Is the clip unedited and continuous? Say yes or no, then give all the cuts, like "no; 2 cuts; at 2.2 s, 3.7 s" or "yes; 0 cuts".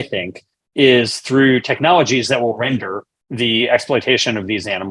yes; 0 cuts